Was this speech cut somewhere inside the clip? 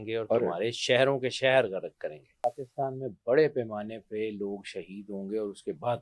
yes; 1 cut; at 2.4 s

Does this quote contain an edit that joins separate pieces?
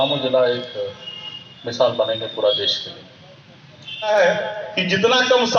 yes; 1 cut; at 4.1 s

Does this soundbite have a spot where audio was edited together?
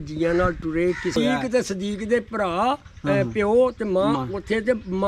yes; 1 cut; at 1.0 s

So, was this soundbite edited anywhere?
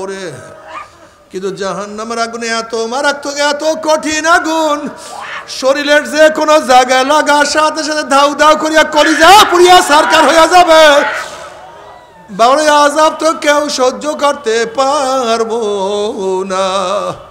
no; 0 cuts

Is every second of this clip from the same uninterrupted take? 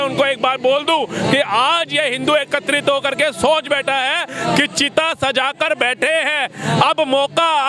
yes; 0 cuts

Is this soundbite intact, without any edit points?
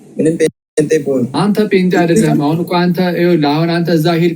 no; 1 cut; at 1.3 s

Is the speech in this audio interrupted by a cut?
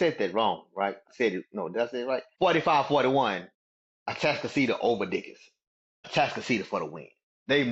yes; 3 cuts; at 1.1 s, 2.3 s, 6.1 s

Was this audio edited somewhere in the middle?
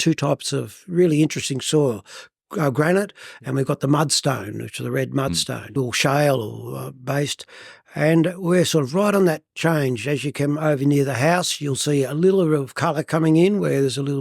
yes; 1 cut; at 5.8 s

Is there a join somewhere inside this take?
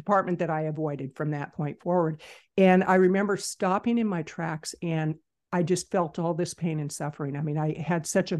no; 0 cuts

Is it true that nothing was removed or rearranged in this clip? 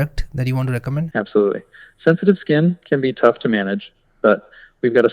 no; 1 cut; at 1.1 s

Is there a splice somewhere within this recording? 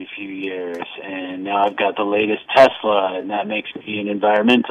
no; 0 cuts

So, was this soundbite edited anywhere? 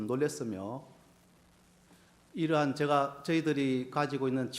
no; 0 cuts

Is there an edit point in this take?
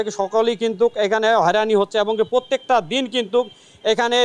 no; 0 cuts

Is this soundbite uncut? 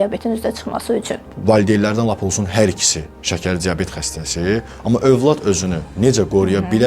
no; 1 cut; at 1.2 s

